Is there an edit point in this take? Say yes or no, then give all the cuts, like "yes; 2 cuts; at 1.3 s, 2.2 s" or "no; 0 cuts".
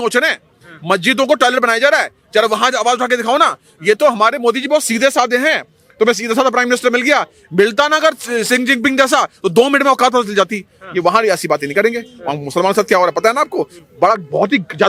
no; 0 cuts